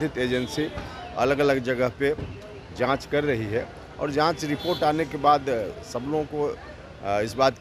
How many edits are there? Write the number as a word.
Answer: zero